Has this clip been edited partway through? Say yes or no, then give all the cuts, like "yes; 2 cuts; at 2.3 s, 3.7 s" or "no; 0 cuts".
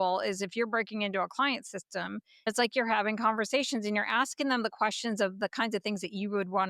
yes; 1 cut; at 2.5 s